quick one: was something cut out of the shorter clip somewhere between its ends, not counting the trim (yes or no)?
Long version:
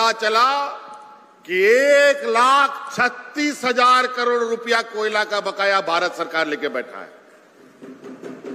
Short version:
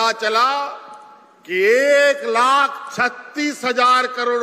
no